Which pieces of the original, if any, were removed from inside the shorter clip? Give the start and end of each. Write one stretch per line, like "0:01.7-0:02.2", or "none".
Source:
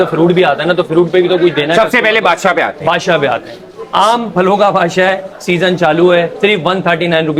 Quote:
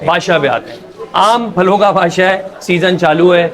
none